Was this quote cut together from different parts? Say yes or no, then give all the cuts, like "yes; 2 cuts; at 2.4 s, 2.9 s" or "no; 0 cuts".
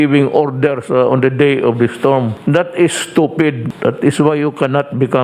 yes; 2 cuts; at 2.4 s, 3.7 s